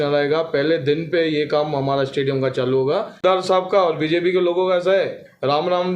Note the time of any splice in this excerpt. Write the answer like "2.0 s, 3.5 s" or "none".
3.2 s